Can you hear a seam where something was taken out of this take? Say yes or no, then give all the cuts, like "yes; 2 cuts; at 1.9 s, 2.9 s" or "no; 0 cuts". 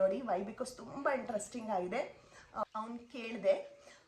yes; 1 cut; at 2.6 s